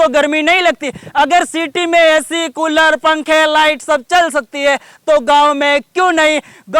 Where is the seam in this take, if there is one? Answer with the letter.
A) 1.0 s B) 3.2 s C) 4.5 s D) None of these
D